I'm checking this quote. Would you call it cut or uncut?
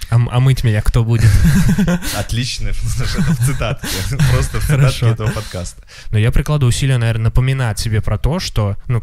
cut